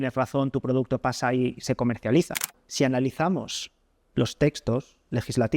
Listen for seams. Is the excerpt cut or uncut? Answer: cut